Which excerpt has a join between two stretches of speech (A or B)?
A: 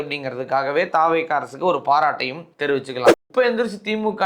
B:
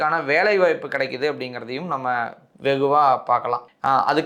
A